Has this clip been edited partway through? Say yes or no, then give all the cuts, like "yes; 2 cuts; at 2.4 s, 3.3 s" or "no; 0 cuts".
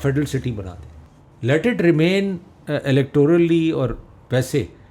no; 0 cuts